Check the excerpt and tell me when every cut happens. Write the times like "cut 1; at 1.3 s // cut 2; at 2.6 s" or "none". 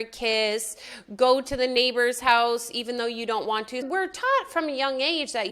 cut 1; at 3.9 s